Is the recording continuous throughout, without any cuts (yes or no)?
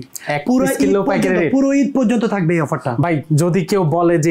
yes